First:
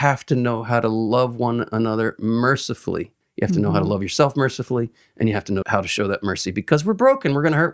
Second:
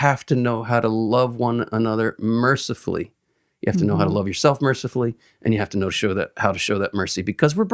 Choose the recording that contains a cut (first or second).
first